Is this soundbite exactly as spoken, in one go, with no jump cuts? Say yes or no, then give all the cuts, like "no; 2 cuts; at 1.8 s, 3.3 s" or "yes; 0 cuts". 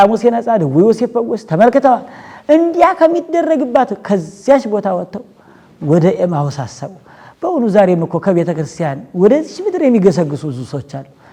yes; 0 cuts